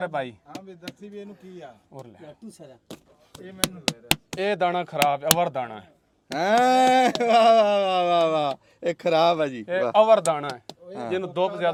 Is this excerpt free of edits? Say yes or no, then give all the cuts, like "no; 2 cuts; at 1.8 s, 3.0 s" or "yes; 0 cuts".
yes; 0 cuts